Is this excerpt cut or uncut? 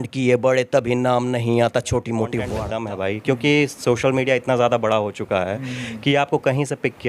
cut